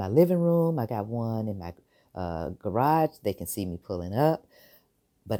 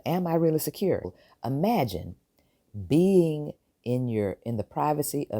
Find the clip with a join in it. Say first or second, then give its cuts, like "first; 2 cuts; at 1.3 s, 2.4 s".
second; 1 cut; at 1.1 s